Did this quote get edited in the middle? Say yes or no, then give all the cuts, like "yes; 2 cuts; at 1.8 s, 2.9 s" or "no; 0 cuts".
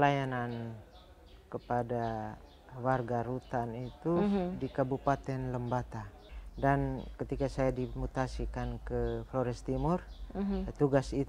yes; 1 cut; at 6.3 s